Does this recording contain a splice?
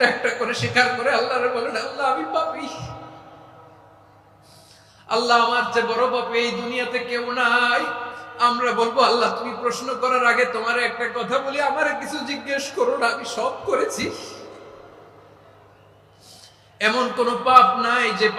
yes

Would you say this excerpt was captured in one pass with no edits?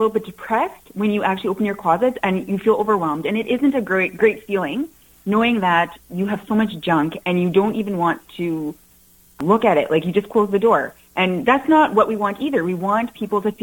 no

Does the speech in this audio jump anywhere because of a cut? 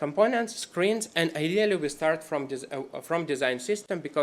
no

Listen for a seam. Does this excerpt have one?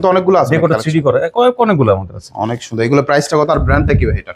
no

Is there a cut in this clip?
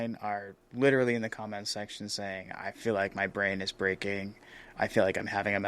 yes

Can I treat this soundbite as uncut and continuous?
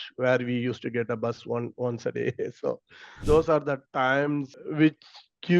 no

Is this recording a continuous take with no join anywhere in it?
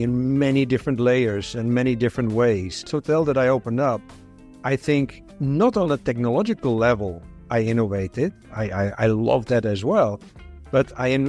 no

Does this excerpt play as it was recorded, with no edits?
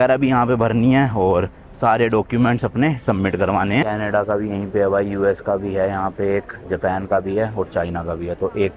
no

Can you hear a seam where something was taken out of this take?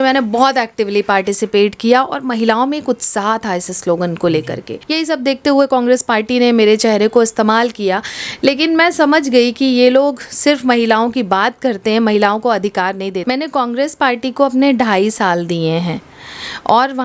yes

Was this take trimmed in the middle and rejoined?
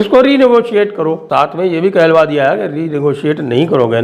yes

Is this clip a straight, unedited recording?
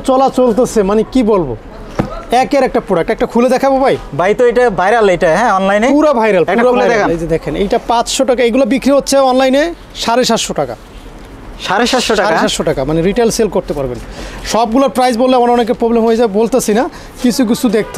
yes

